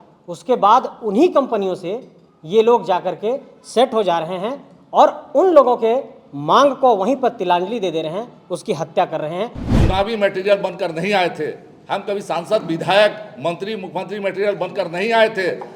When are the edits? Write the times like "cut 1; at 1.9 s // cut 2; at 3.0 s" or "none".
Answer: cut 1; at 9.6 s